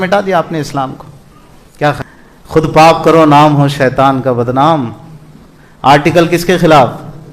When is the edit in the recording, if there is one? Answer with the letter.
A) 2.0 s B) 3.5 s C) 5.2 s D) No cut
A